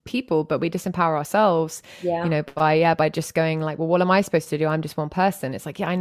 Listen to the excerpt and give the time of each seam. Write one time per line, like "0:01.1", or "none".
none